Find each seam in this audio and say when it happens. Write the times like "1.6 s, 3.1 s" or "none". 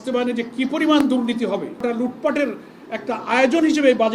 1.8 s